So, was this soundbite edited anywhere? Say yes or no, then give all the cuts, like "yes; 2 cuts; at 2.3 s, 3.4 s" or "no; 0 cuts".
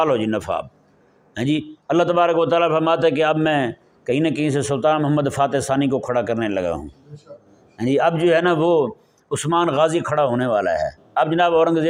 no; 0 cuts